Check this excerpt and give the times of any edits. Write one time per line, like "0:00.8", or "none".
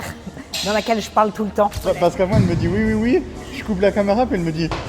0:01.8